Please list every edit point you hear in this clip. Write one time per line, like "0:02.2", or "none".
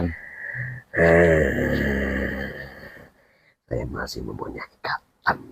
none